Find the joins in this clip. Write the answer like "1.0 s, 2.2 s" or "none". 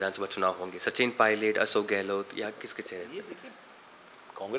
none

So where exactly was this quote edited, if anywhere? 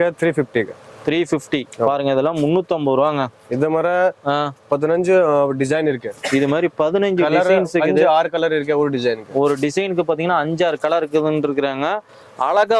none

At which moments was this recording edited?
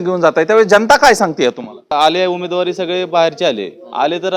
1.9 s

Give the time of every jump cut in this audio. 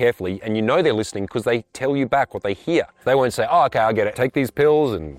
3.0 s, 4.1 s

